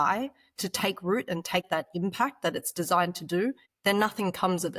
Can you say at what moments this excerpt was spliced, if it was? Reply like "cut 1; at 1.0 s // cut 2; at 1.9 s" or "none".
cut 1; at 1.7 s // cut 2; at 3.7 s